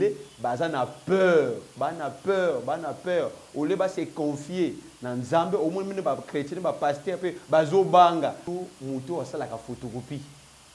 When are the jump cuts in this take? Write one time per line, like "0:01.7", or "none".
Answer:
0:08.5